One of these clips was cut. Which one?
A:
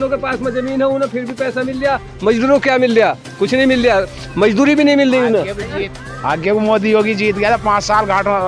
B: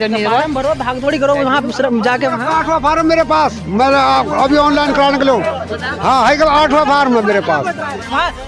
A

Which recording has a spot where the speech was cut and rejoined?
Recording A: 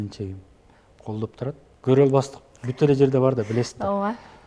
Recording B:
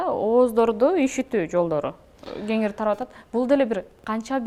A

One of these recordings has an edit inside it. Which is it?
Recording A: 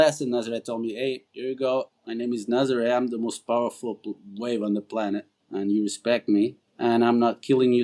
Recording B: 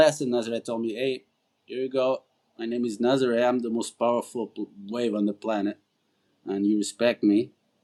A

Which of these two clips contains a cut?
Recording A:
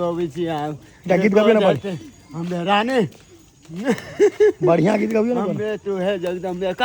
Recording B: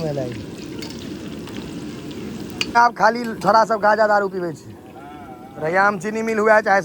B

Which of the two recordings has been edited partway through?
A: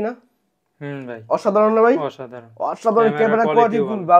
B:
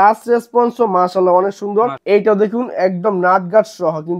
B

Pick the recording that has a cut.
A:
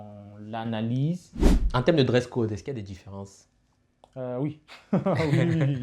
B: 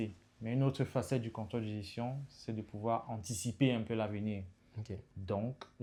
A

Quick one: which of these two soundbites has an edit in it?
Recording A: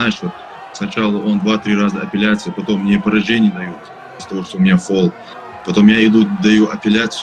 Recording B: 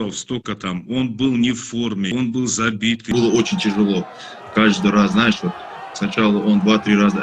B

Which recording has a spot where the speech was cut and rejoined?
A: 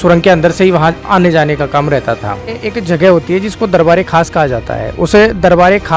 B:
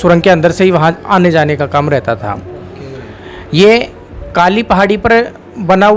A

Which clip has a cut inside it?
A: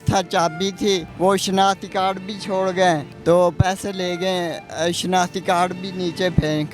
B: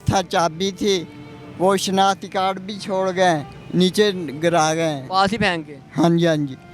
A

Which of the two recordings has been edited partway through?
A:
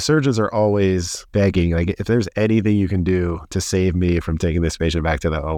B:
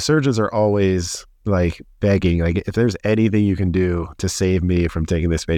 A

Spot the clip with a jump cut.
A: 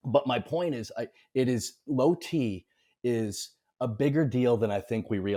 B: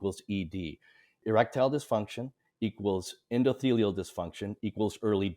B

